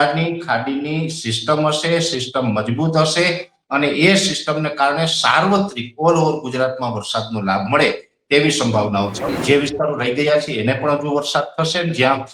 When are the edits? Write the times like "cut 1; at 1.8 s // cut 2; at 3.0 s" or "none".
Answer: cut 1; at 9.3 s